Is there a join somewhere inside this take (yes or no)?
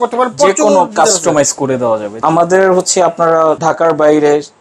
yes